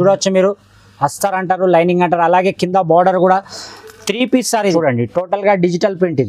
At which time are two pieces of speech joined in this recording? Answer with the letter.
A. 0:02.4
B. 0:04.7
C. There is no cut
B